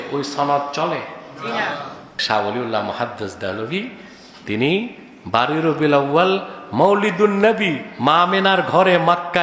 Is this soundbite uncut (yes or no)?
no